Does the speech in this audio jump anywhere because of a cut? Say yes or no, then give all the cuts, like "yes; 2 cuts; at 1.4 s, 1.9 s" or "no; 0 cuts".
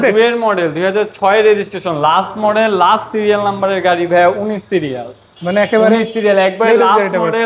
no; 0 cuts